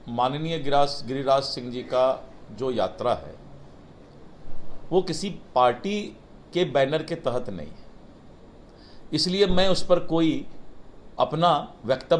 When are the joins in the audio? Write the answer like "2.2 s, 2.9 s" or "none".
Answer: none